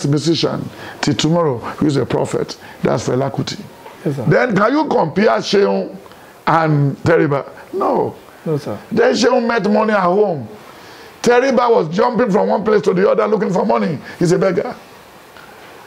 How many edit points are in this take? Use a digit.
1